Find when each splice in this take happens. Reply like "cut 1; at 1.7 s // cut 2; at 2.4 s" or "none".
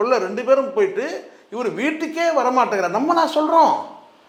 none

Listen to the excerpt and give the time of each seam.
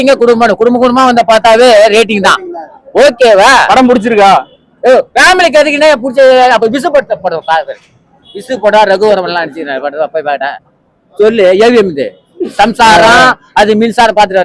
none

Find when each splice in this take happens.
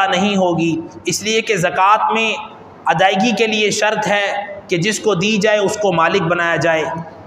none

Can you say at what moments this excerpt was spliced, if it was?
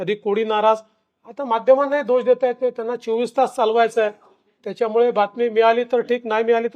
none

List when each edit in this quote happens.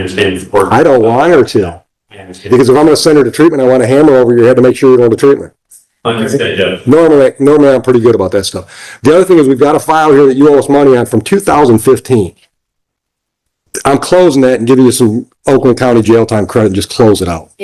none

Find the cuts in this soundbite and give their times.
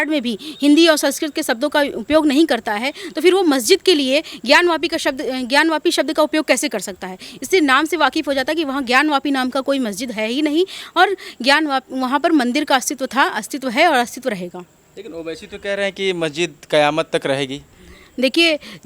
none

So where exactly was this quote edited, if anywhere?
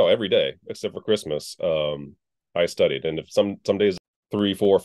cut 1; at 4.0 s

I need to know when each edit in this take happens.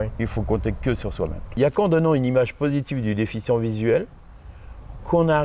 cut 1; at 1.6 s

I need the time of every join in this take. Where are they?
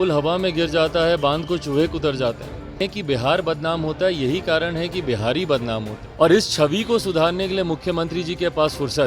cut 1; at 2.8 s // cut 2; at 6.0 s

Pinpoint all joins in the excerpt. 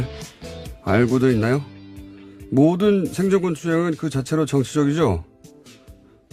cut 1; at 5.4 s

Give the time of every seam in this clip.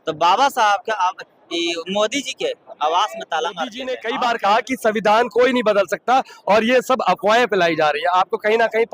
cut 1; at 3.9 s

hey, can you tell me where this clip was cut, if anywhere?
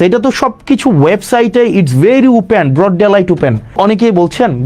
cut 1; at 3.8 s

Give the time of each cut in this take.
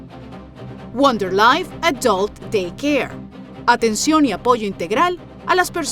cut 1; at 0.9 s

